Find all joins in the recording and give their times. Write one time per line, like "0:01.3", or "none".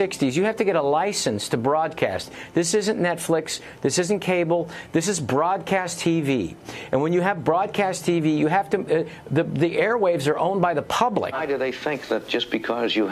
0:11.4